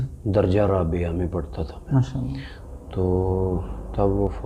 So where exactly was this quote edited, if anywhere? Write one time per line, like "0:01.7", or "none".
none

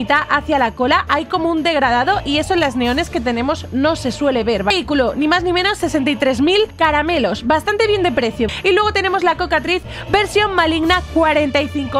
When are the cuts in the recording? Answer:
0:04.7
0:06.7
0:08.5

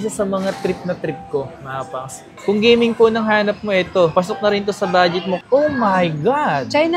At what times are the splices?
0:02.3
0:05.4

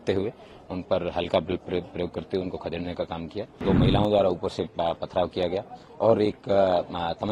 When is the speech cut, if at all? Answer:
0:03.6

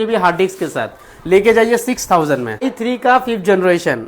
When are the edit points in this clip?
0:02.7

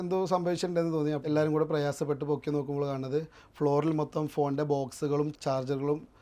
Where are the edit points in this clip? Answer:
0:01.2
0:05.3

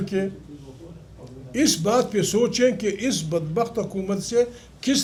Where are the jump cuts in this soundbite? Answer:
none

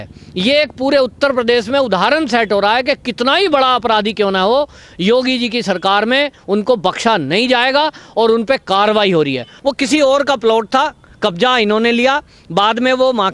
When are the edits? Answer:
0:09.5

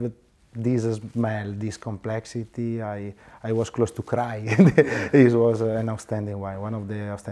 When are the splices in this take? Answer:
none

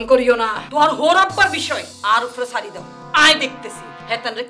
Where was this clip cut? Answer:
none

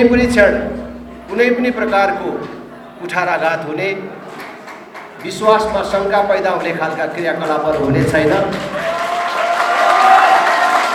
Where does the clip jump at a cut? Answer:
none

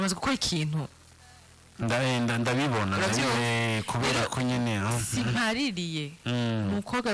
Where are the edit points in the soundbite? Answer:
none

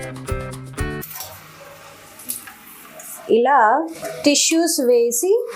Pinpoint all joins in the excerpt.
0:01.1

